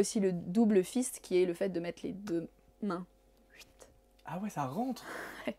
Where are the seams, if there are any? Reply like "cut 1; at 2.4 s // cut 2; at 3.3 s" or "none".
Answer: none